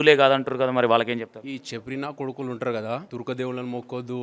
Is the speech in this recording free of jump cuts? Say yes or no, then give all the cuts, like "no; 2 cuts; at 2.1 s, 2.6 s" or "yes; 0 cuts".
no; 1 cut; at 3.1 s